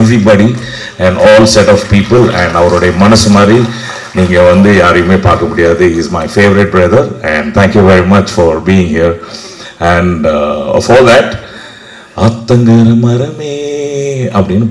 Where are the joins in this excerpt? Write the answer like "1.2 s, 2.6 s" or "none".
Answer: none